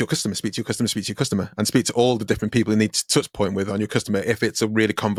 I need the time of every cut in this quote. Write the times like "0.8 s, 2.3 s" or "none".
none